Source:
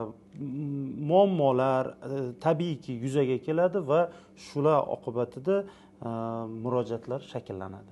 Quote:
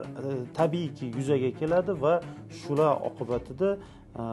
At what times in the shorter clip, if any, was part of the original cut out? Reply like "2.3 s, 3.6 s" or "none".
none